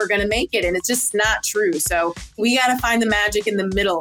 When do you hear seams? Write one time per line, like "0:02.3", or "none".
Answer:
0:01.1
0:02.4